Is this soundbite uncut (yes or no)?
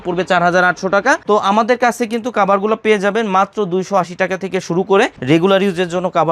no